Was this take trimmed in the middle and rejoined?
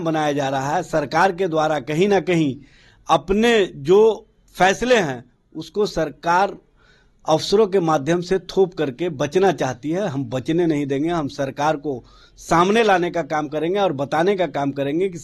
no; 0 cuts

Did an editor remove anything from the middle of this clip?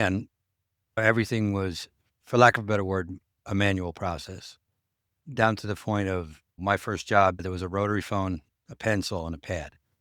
yes; 1 cut; at 7.4 s

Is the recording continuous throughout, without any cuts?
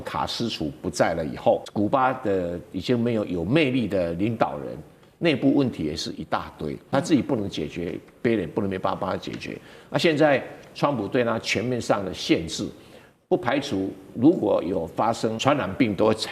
no; 3 cuts; at 1.7 s, 6.9 s, 15.4 s

